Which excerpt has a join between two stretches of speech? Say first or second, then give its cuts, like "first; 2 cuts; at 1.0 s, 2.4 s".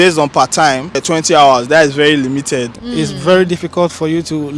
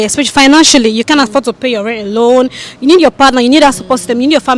first; 2 cuts; at 1.0 s, 2.7 s